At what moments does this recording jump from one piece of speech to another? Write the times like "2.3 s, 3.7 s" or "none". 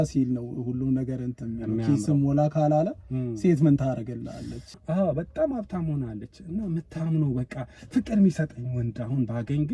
4.8 s

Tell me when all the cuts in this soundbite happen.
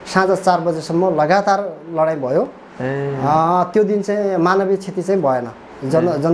none

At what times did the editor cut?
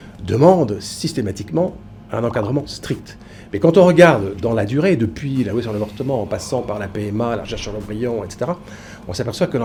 none

